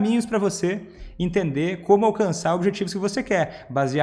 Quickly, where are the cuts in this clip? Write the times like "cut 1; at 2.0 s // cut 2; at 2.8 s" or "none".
none